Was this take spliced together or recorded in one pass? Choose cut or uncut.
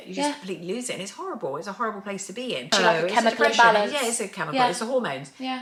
uncut